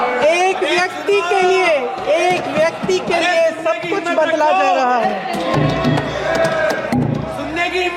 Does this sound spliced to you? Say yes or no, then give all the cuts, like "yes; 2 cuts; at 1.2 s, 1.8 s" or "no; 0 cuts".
no; 0 cuts